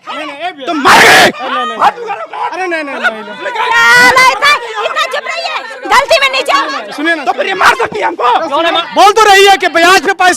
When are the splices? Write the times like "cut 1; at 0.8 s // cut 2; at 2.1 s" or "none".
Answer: cut 1; at 8.8 s